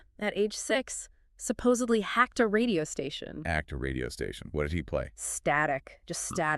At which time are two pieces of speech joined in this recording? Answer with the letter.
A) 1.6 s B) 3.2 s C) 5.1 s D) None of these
D